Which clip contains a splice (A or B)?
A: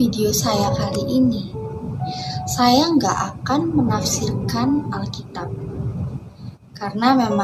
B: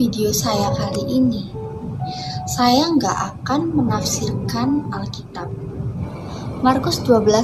B